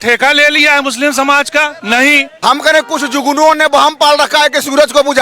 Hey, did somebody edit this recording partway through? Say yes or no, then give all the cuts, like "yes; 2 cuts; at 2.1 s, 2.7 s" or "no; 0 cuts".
yes; 1 cut; at 2.3 s